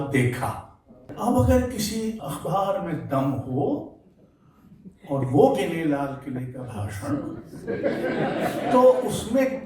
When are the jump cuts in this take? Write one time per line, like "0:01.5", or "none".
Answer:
0:01.0
0:02.2